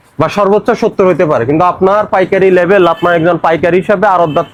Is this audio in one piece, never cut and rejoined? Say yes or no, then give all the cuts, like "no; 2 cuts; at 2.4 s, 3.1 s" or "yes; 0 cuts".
yes; 0 cuts